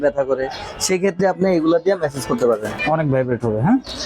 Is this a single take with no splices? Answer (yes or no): no